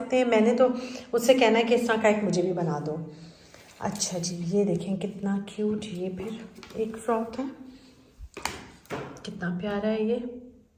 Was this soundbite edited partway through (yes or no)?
no